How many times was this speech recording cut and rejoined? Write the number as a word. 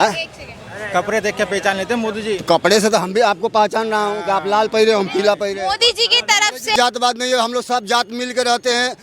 one